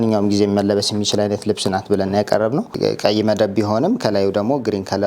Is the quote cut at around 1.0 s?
no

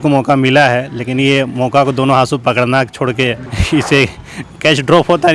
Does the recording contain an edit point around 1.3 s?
no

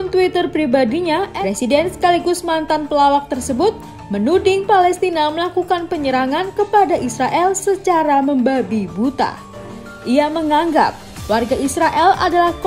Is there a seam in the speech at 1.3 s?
yes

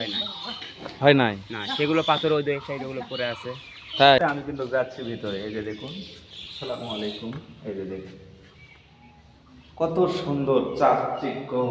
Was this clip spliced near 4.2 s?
yes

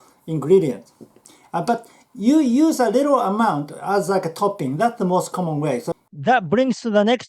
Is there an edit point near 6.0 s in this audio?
yes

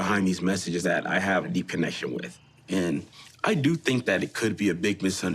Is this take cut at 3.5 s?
no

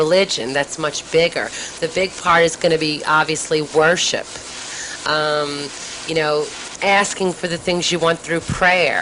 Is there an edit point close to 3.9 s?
no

